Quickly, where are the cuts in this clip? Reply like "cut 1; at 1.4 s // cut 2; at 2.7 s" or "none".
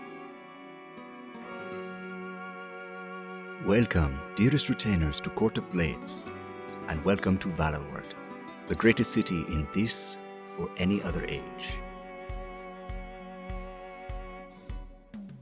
cut 1; at 1.1 s